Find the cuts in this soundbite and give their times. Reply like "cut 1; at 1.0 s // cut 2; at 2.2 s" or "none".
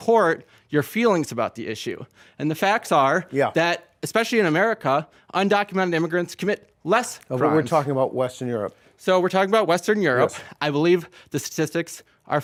none